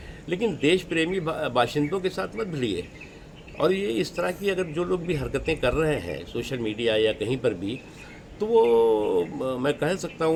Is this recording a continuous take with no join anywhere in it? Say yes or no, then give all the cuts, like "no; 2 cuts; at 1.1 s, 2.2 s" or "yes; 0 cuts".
yes; 0 cuts